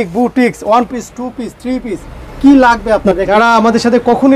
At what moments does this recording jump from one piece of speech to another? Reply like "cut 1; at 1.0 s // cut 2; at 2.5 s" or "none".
cut 1; at 3.3 s